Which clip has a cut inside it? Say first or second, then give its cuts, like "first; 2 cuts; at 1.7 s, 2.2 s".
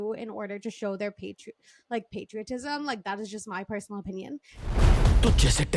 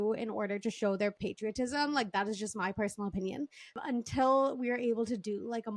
second; 2 cuts; at 1.2 s, 3.8 s